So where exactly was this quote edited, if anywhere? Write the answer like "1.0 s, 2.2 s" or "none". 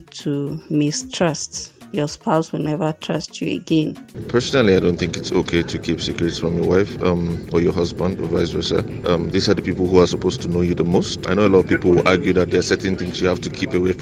4.1 s, 11.3 s